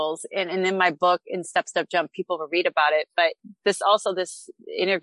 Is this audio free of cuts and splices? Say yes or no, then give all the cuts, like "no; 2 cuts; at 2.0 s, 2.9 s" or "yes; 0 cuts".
yes; 0 cuts